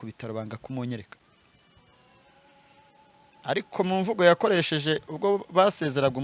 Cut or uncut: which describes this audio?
uncut